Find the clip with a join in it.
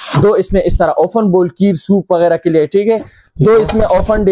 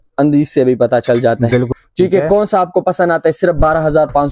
second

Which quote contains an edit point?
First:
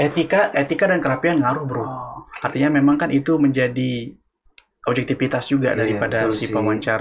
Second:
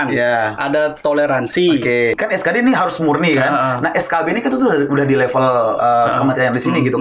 second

